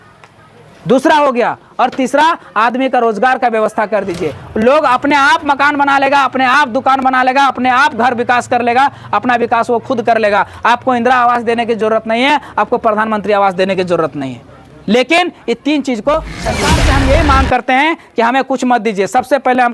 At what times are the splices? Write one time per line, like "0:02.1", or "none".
0:16.6